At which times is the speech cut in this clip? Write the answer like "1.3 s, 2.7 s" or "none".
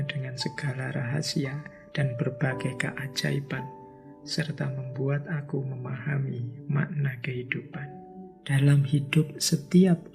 8.3 s